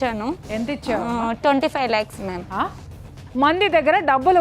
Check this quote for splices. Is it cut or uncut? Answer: cut